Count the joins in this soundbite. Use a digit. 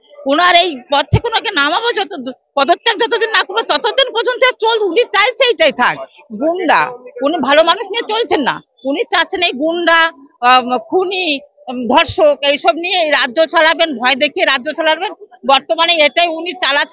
0